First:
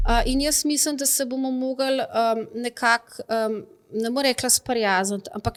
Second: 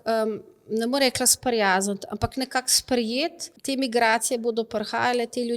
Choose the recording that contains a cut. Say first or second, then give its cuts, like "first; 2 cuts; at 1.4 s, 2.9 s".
second; 1 cut; at 3.5 s